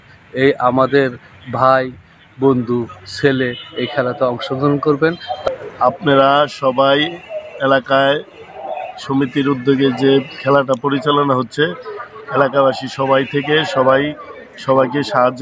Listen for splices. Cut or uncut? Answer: cut